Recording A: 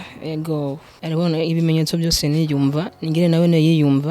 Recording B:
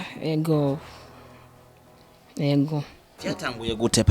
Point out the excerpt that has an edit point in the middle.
A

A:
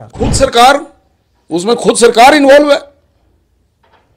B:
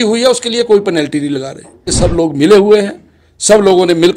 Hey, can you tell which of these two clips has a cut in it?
B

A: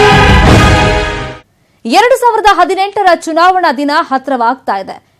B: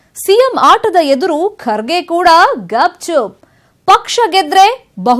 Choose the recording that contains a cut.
A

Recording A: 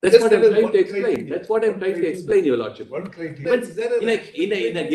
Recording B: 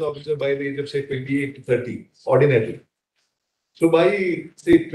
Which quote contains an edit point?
A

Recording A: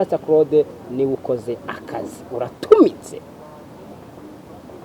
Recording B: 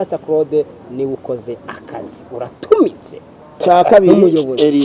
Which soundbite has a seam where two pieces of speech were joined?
B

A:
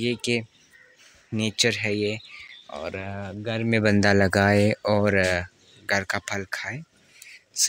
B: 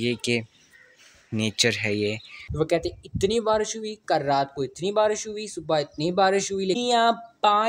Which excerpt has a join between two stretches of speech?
B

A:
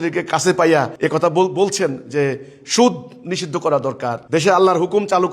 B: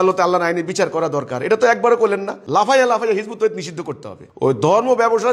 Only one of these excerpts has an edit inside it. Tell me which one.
A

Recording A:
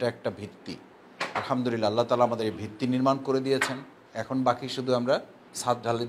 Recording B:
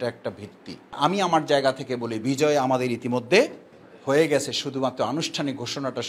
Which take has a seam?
B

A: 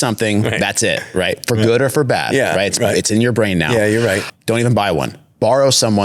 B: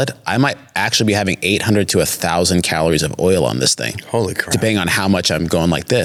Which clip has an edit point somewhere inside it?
A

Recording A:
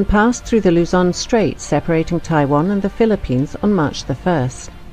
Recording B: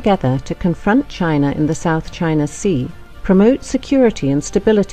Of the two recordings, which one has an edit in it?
A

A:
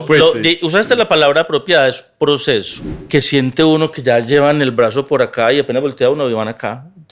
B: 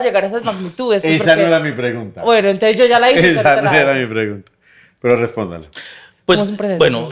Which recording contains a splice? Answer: A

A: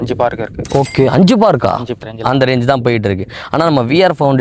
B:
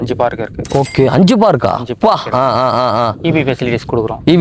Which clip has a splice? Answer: A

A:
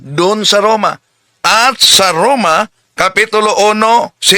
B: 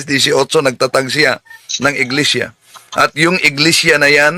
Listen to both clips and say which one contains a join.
A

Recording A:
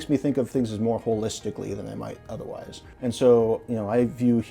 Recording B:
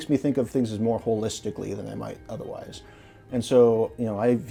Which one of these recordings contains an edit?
A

